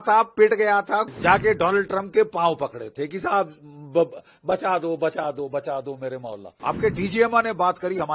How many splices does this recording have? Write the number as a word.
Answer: two